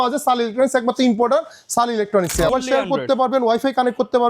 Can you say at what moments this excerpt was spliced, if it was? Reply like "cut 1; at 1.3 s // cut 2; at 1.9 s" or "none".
cut 1; at 2.5 s